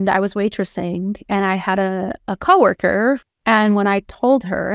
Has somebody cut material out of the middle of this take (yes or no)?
yes